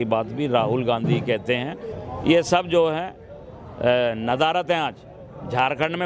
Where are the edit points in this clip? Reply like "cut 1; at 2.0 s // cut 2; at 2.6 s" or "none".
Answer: cut 1; at 2.0 s